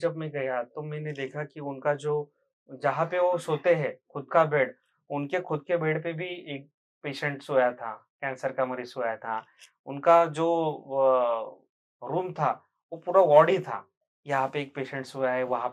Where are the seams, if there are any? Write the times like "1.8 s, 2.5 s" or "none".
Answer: none